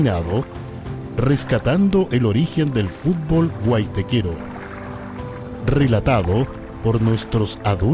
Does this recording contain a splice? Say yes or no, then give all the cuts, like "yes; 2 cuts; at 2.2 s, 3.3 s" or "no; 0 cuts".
yes; 2 cuts; at 4.4 s, 5.6 s